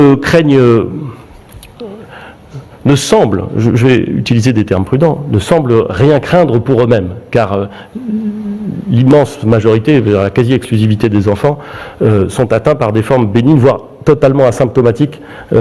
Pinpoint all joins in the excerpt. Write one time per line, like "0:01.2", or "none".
none